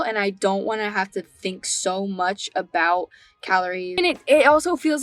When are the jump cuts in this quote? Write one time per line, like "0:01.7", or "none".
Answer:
0:04.0